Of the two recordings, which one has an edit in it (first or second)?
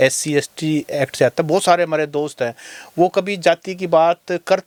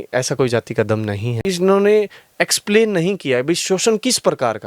second